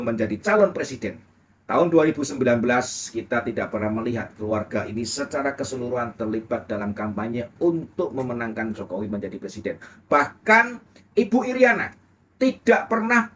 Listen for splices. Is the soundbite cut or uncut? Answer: uncut